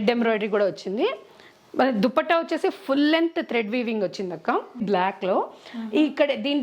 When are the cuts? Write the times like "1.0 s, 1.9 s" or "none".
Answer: 4.8 s